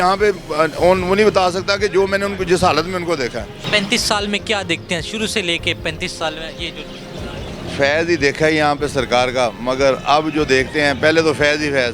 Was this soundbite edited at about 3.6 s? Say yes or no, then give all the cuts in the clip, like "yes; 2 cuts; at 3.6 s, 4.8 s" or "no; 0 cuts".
yes; 1 cut; at 3.6 s